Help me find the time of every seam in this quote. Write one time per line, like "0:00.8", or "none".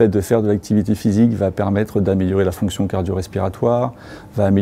none

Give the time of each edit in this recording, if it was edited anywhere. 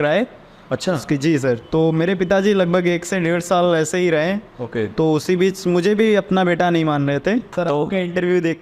0:07.5

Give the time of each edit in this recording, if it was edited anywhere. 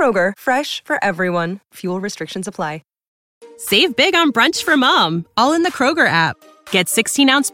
0:03.2

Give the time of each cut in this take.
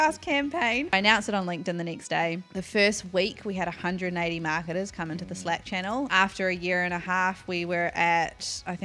0:00.9
0:06.1

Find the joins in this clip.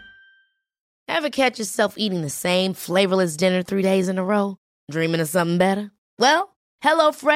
0:00.9

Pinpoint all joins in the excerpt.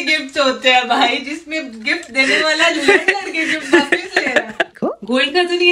0:04.8

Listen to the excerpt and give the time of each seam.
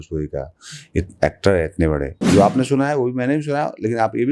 0:02.1

